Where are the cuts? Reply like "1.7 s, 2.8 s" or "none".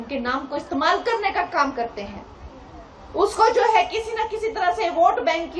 none